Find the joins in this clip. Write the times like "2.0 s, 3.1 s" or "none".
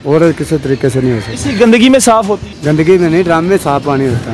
2.5 s